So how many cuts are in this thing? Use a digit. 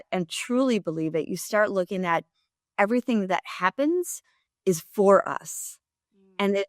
0